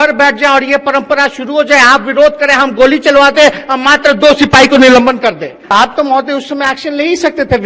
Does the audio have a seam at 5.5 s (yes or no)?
yes